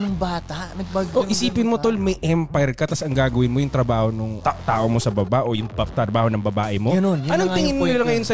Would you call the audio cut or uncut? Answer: uncut